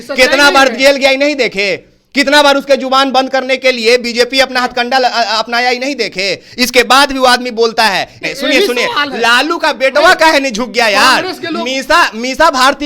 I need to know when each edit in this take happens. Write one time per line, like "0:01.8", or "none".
0:08.3